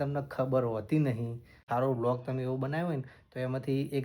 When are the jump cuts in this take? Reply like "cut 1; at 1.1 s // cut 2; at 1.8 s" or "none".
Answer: cut 1; at 1.6 s